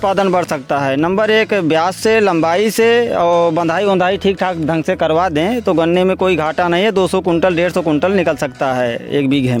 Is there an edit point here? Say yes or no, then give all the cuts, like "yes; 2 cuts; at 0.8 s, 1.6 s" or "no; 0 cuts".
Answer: no; 0 cuts